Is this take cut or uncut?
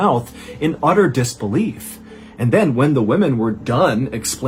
uncut